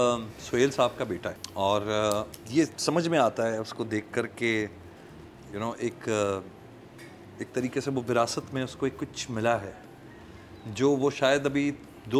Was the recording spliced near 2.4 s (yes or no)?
yes